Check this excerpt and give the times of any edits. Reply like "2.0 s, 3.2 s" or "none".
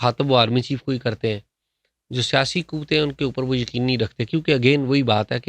none